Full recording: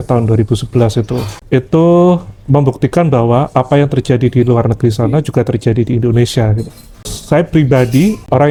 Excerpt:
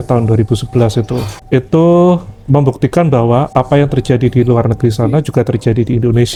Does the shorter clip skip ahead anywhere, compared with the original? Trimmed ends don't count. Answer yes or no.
no